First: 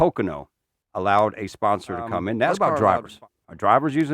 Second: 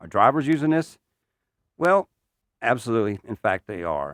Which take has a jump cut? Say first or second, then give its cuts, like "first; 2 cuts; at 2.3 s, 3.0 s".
first; 1 cut; at 2.6 s